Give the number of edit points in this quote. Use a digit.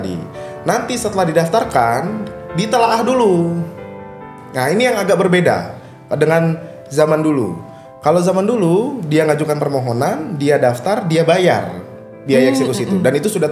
0